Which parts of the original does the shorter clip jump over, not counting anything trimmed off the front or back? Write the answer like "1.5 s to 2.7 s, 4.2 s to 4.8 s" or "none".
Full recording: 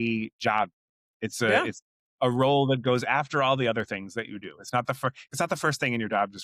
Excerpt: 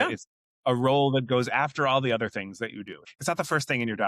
4.6 s to 5.2 s

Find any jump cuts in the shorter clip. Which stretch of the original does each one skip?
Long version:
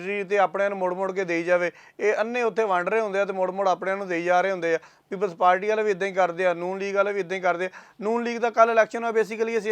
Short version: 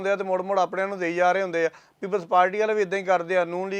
none

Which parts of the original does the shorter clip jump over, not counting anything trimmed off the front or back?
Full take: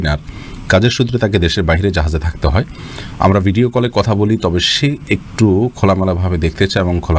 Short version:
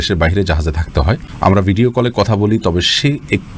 2.8 s to 3.1 s

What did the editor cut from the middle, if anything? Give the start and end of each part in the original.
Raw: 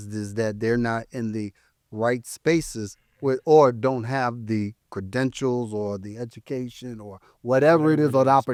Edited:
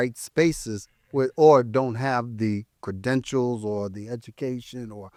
none

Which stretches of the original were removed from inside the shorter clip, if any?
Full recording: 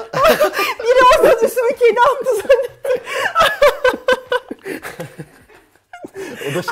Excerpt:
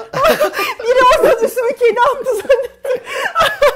none

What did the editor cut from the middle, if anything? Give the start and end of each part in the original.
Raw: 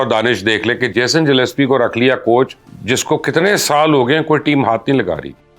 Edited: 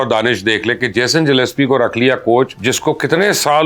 2.6 s to 2.9 s

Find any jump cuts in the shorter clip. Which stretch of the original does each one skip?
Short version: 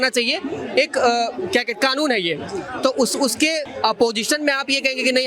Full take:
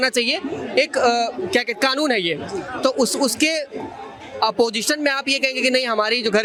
3.7 s to 4.3 s

